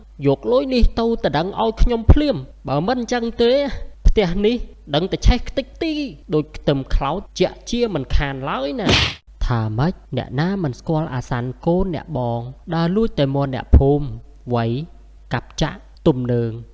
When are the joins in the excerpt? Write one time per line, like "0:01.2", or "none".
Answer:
0:09.2